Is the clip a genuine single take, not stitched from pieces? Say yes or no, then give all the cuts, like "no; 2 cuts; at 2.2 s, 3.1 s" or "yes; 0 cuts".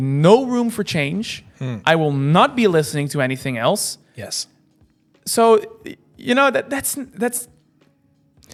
yes; 0 cuts